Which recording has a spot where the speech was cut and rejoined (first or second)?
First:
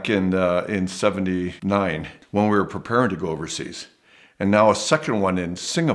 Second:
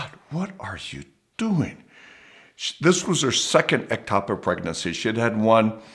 first